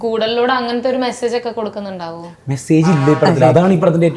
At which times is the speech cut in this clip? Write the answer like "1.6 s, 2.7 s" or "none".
none